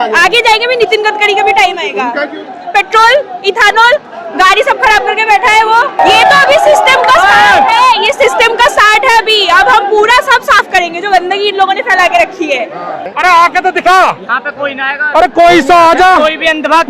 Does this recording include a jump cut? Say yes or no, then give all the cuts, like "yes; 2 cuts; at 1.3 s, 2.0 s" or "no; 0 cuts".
yes; 2 cuts; at 6.0 s, 13.1 s